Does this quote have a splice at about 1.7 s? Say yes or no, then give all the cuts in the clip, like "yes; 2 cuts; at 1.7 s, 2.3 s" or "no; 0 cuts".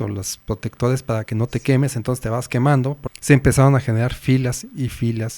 no; 1 cut; at 3.0 s